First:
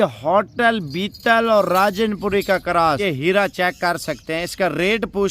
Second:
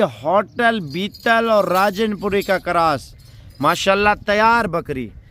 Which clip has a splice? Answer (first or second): first